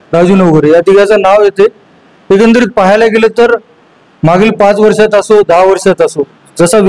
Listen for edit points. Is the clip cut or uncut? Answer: uncut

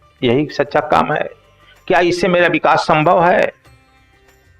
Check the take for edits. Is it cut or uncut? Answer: cut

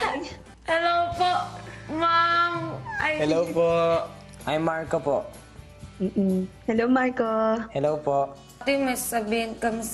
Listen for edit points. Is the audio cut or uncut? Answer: cut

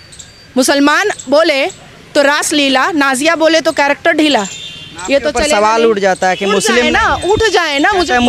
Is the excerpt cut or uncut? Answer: uncut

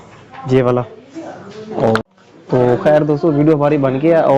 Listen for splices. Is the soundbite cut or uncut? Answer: cut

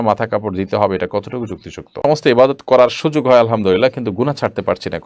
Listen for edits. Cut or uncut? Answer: cut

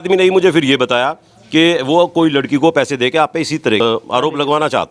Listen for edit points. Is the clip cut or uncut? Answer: cut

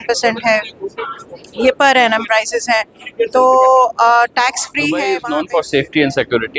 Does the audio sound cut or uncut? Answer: cut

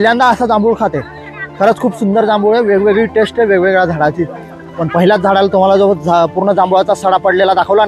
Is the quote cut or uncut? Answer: uncut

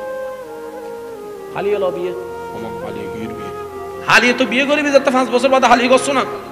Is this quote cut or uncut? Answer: cut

